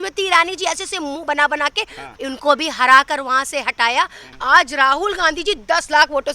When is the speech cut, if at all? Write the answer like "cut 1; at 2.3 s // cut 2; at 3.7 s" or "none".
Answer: cut 1; at 2.1 s // cut 2; at 4.3 s